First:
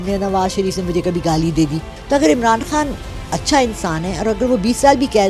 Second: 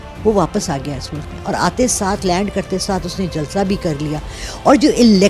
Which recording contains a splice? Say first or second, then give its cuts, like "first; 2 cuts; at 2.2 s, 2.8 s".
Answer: first; 1 cut; at 1.9 s